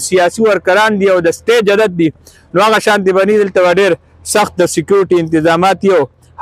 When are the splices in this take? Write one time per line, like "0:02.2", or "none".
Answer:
none